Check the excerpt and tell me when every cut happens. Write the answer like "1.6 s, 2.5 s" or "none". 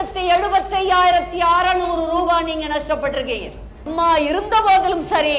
3.9 s